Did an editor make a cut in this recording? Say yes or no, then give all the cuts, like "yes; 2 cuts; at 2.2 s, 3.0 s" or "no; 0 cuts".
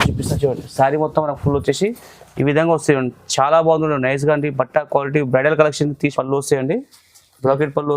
yes; 1 cut; at 6.1 s